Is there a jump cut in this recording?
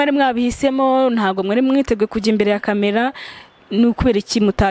no; 0 cuts

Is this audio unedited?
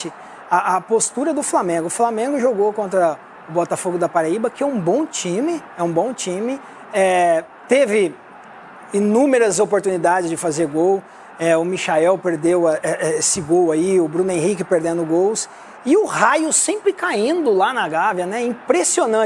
yes; 0 cuts

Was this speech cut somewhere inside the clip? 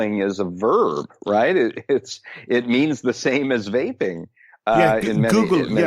no; 0 cuts

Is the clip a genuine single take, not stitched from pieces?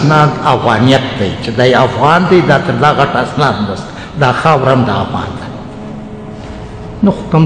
yes; 0 cuts

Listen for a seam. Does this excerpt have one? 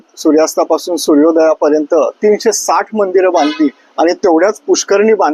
no; 0 cuts

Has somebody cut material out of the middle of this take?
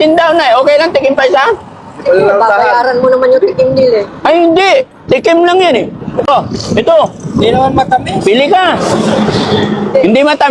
yes; 1 cut; at 6.3 s

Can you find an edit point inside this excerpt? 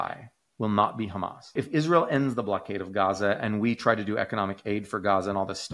yes; 1 cut; at 1.5 s

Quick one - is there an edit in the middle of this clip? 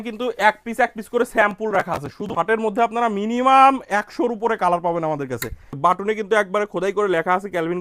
yes; 2 cuts; at 2.3 s, 5.6 s

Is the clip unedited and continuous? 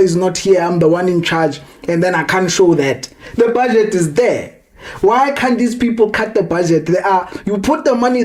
yes; 0 cuts

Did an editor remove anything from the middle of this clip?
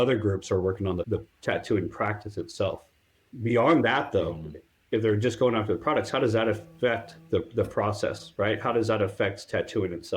yes; 1 cut; at 1.1 s

